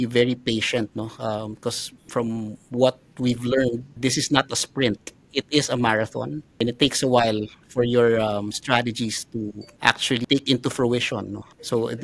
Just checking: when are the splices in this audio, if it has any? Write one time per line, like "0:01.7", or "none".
none